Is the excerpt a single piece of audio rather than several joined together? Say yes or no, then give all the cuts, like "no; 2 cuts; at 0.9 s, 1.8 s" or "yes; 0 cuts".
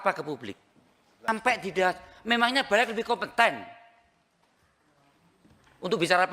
no; 1 cut; at 1.3 s